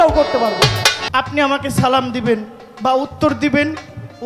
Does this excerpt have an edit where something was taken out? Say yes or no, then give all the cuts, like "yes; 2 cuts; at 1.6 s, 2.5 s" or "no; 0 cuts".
yes; 1 cut; at 1.0 s